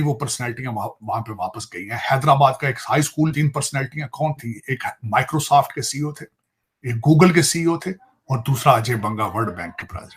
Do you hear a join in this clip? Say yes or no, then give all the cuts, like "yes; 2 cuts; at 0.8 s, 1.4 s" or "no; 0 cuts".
yes; 1 cut; at 3.3 s